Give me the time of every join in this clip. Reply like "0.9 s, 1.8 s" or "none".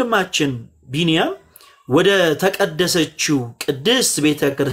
none